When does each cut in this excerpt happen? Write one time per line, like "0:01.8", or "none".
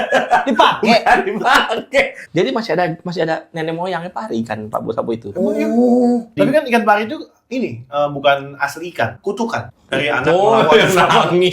0:02.2
0:06.3